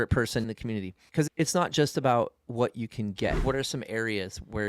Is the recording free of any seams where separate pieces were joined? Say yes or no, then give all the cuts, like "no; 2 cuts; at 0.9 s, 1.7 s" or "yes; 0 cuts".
no; 1 cut; at 3.4 s